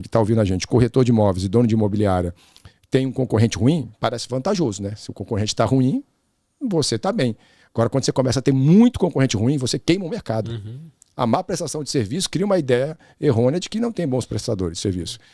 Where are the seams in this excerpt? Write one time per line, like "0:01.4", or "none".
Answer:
none